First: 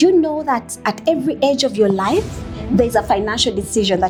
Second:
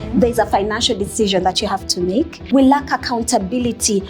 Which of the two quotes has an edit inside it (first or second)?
second